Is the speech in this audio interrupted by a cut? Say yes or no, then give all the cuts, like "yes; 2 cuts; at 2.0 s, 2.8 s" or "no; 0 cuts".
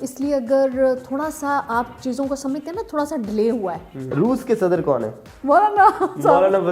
yes; 1 cut; at 3.9 s